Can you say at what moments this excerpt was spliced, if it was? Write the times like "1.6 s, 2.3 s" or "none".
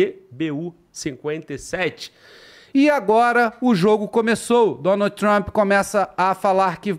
2.5 s